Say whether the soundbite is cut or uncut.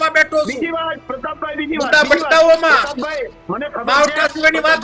uncut